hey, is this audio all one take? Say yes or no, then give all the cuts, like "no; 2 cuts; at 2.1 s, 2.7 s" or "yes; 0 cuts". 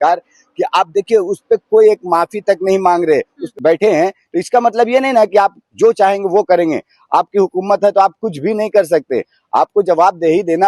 no; 1 cut; at 3.4 s